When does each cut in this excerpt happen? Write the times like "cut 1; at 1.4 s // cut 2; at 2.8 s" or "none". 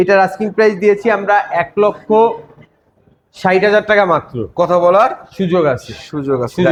none